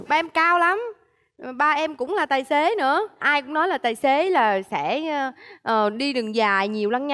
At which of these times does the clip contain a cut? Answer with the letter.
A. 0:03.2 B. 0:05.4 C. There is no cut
C